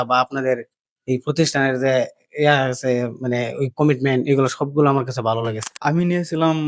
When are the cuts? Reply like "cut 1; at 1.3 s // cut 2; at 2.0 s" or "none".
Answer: cut 1; at 5.6 s